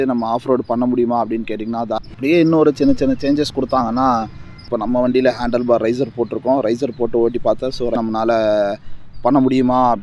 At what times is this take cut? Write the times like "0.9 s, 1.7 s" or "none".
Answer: 1.9 s, 4.7 s, 8.0 s